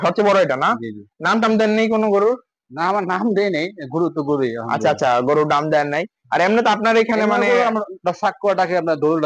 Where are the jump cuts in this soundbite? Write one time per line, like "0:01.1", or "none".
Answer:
none